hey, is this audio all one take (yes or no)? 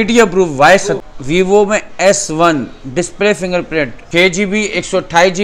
no